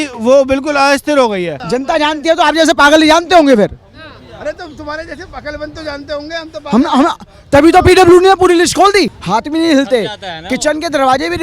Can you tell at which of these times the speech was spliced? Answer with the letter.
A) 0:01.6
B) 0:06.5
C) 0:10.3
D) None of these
A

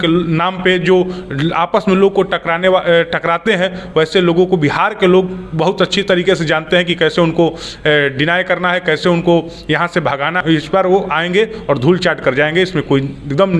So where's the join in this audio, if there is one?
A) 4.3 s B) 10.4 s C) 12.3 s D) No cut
B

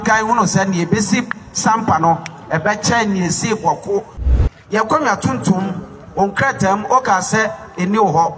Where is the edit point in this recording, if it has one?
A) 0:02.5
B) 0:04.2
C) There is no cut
B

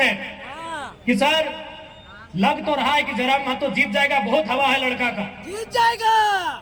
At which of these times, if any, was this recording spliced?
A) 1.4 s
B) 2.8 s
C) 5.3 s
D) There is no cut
D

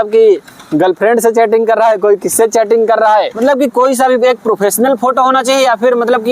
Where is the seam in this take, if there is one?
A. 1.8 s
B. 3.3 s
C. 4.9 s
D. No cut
B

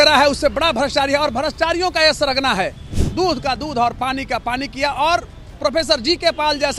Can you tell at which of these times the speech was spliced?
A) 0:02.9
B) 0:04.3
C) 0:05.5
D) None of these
A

